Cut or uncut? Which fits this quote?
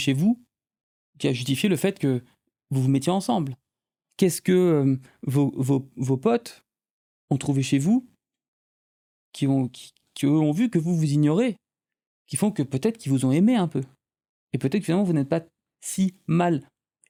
uncut